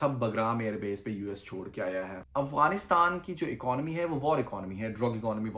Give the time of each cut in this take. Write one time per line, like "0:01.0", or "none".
0:02.2

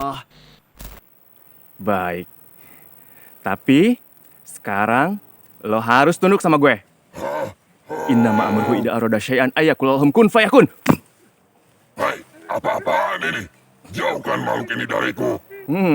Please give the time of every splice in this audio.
0:00.9

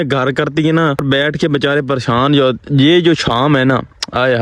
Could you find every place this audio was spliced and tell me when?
0:01.0

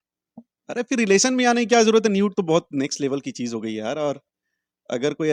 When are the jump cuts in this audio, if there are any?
none

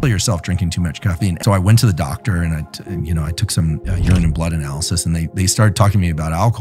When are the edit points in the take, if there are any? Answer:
0:01.4

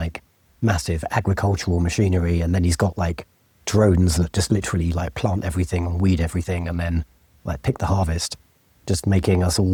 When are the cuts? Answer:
none

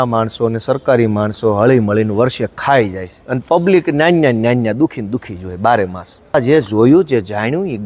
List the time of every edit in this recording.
0:06.3

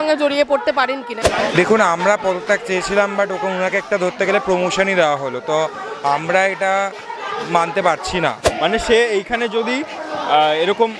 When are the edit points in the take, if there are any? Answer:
0:01.2
0:08.5

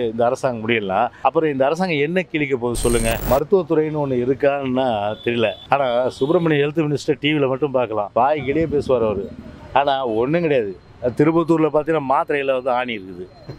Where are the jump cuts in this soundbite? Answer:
0:01.1
0:03.2
0:05.6
0:08.1

